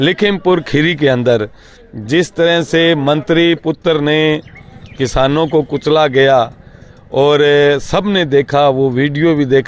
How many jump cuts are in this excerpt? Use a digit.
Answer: 0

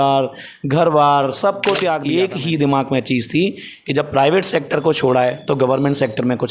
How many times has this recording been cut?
1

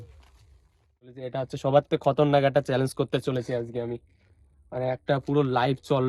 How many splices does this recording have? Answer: 1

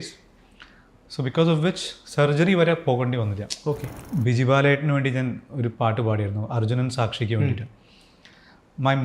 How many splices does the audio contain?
1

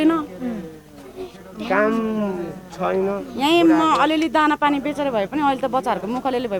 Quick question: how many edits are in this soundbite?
0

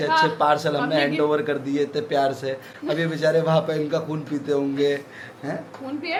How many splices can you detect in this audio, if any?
0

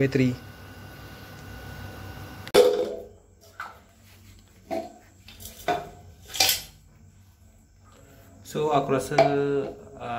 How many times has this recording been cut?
1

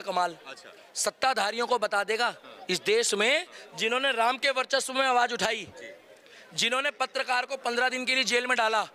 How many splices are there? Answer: 0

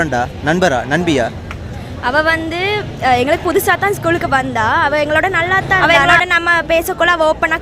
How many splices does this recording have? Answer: 1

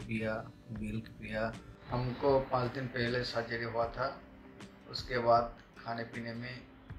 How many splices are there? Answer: 1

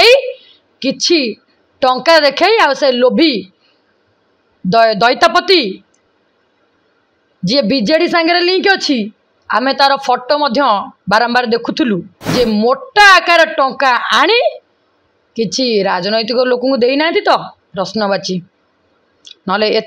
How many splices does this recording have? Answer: 1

